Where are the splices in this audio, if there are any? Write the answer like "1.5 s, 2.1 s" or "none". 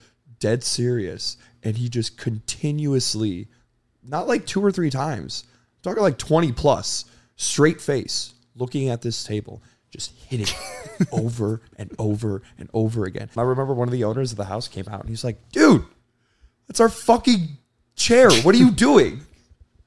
13.3 s